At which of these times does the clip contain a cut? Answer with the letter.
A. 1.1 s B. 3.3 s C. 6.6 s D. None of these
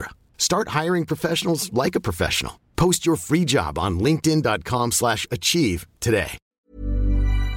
C